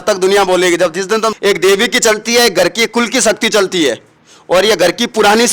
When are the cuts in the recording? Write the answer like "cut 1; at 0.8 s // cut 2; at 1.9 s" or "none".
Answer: cut 1; at 1.3 s